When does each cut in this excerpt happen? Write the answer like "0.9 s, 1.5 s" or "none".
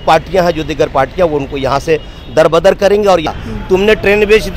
3.3 s